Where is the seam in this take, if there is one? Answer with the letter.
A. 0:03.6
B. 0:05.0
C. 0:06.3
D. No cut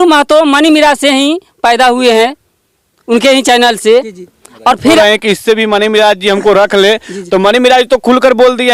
B